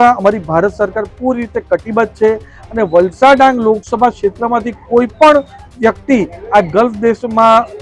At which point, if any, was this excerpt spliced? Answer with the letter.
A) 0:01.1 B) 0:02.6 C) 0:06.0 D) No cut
B